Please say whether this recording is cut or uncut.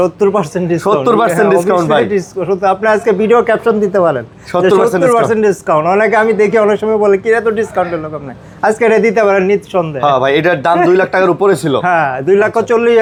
uncut